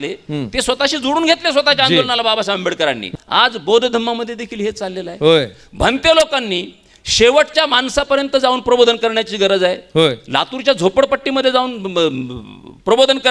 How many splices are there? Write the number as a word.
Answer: one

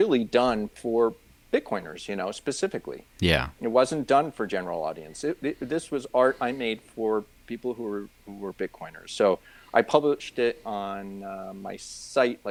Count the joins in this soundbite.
zero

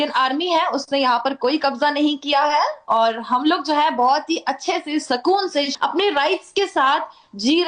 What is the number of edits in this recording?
one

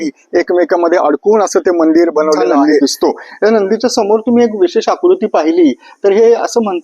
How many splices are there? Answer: one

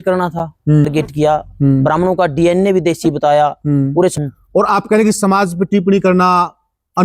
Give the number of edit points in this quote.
two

